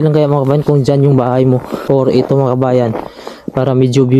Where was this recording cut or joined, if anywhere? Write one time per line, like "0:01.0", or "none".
0:01.7